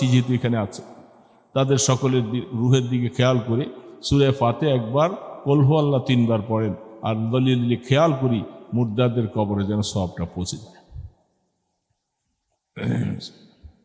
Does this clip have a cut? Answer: no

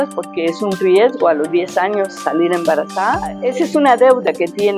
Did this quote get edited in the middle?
yes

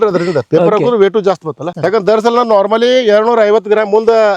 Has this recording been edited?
yes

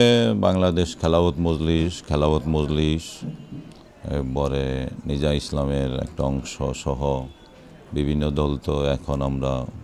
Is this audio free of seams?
yes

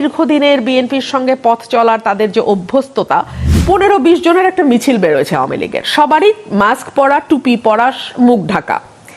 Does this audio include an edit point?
yes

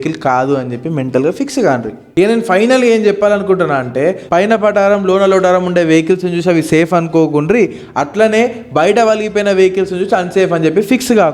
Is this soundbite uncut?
yes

